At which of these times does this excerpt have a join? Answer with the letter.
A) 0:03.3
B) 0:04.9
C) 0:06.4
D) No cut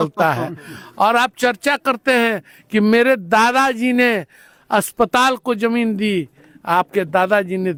D